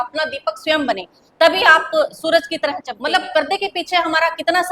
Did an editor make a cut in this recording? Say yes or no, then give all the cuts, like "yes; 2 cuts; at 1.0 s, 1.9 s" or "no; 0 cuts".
yes; 1 cut; at 2.9 s